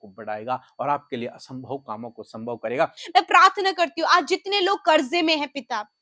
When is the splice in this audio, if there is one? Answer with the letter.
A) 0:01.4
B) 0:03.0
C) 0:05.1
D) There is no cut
B